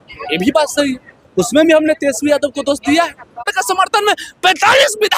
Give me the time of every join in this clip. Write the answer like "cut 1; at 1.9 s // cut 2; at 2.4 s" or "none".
cut 1; at 3.5 s